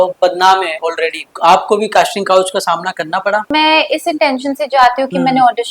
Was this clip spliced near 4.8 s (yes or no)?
no